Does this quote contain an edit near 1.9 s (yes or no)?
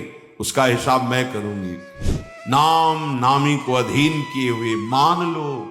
yes